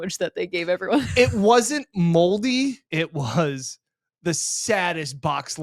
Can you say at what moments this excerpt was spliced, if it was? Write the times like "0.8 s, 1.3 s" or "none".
2.8 s